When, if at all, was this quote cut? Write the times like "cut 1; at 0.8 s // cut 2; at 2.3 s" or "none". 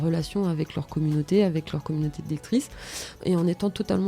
cut 1; at 3.2 s